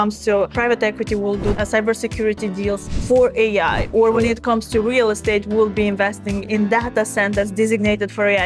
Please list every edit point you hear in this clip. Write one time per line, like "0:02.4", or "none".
0:01.5